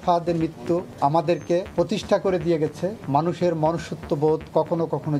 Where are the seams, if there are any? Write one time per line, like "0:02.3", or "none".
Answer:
0:00.9
0:01.7
0:03.0